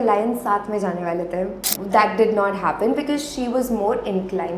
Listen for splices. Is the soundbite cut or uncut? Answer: cut